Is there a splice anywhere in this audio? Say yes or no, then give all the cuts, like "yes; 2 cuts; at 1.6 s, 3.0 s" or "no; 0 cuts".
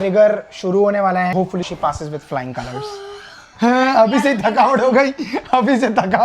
yes; 1 cut; at 1.4 s